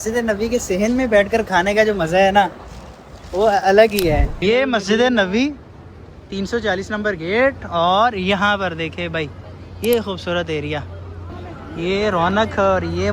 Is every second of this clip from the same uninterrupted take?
no; 2 cuts; at 4.3 s, 11.2 s

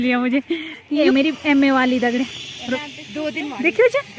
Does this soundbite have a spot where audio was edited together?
yes; 2 cuts; at 1.1 s, 2.8 s

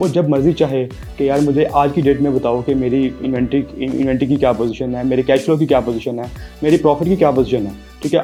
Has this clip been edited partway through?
no; 0 cuts

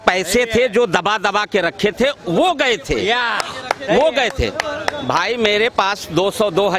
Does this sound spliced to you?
no; 0 cuts

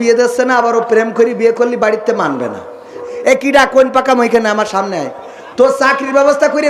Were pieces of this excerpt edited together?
yes; 1 cut; at 3.0 s

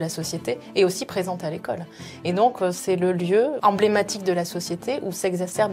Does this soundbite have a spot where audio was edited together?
yes; 1 cut; at 3.6 s

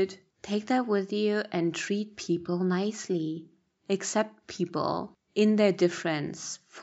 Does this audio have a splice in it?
no; 0 cuts

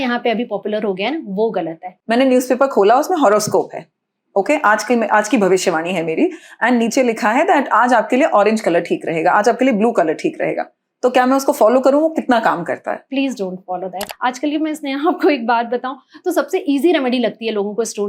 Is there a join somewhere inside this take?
yes; 2 cuts; at 1.9 s, 14.0 s

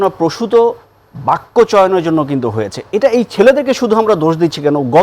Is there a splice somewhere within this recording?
no; 0 cuts

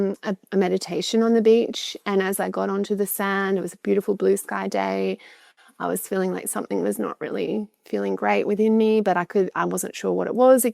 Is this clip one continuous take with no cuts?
yes; 0 cuts

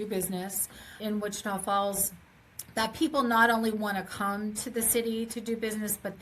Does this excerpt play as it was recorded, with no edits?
no; 1 cut; at 1.0 s

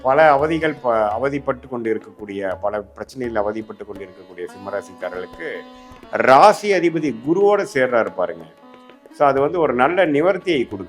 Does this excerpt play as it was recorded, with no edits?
yes; 0 cuts

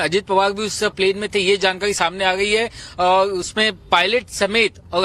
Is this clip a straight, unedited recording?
no; 1 cut; at 3.5 s

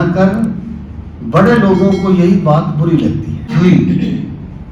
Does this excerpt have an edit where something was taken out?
yes; 1 cut; at 3.5 s

